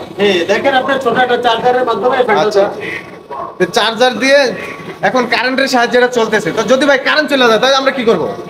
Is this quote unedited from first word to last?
yes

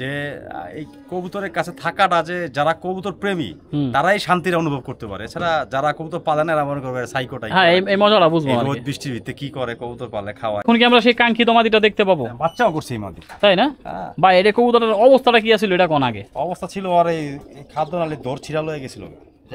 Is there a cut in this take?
yes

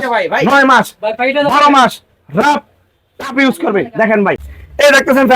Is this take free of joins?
no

